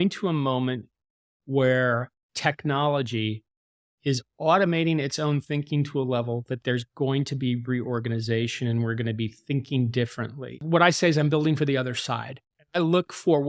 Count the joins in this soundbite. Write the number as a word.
one